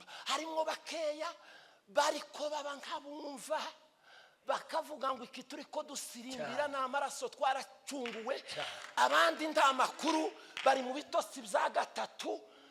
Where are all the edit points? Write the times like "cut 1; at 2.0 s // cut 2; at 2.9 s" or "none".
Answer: none